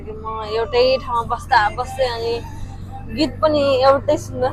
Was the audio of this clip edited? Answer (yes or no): no